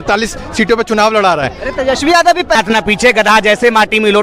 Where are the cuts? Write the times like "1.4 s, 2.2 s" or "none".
2.5 s